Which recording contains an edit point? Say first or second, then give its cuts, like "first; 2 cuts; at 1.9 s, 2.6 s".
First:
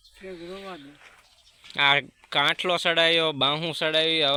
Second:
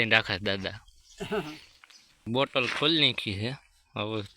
second; 1 cut; at 2.3 s